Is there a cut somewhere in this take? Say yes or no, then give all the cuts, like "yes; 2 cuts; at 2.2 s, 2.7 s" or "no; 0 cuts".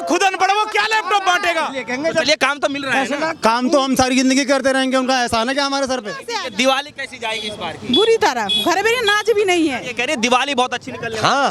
yes; 3 cuts; at 1.8 s, 6.3 s, 9.9 s